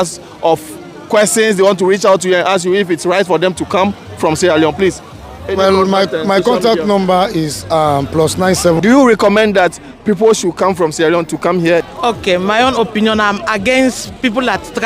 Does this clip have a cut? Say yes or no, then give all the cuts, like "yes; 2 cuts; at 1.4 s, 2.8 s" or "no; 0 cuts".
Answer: yes; 2 cuts; at 8.8 s, 11.9 s